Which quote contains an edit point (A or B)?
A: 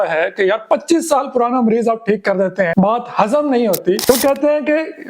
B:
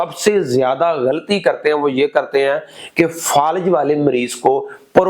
A